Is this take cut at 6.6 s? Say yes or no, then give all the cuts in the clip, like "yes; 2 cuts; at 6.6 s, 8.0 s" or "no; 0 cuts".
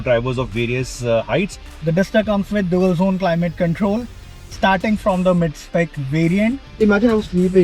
yes; 2 cuts; at 1.6 s, 6.6 s